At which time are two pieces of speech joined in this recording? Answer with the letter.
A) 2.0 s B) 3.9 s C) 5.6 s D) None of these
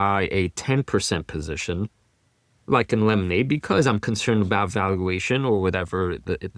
D